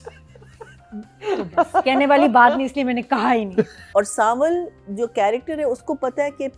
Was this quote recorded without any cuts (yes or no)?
no